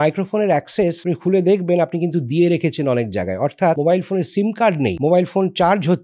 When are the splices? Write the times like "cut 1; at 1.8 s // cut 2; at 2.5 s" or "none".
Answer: cut 1; at 1.0 s // cut 2; at 3.8 s // cut 3; at 5.0 s